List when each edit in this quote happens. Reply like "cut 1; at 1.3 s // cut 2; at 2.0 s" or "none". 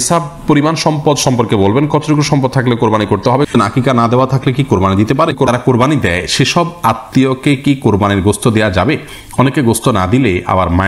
cut 1; at 3.5 s // cut 2; at 5.5 s